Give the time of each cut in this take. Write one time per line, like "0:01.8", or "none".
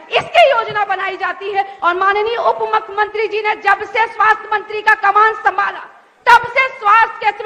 0:01.7